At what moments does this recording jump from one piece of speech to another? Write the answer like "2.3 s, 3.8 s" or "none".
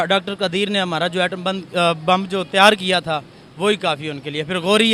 none